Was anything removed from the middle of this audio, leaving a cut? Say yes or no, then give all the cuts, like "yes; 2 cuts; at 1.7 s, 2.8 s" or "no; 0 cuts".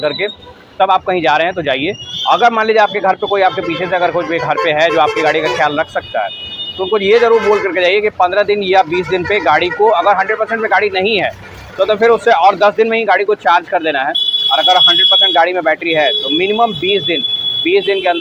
no; 0 cuts